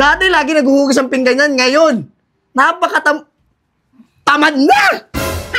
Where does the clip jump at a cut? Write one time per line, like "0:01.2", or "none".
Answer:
none